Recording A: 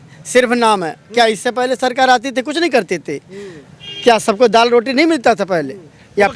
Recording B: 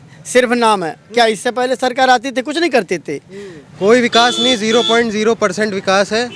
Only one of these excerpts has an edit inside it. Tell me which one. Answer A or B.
B